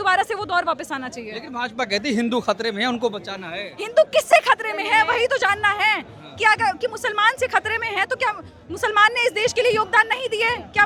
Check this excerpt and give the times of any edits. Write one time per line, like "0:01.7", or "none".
none